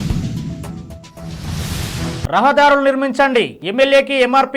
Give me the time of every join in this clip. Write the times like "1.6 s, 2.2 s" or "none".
2.3 s